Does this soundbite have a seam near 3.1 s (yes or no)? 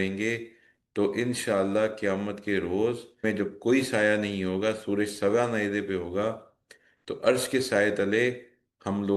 yes